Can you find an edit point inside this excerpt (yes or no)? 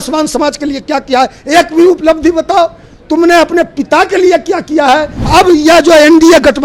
yes